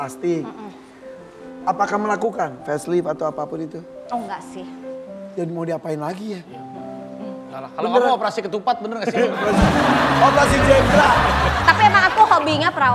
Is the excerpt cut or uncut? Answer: uncut